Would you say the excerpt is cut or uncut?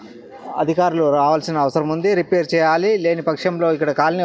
uncut